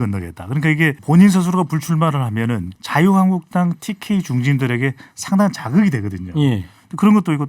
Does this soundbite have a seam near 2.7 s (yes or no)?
yes